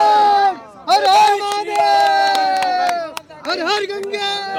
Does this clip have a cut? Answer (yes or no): no